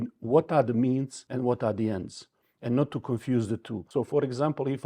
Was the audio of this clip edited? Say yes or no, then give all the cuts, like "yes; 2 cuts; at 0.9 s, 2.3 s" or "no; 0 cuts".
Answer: yes; 2 cuts; at 1.2 s, 3.8 s